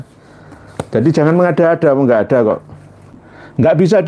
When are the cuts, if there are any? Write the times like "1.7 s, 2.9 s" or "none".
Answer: 3.1 s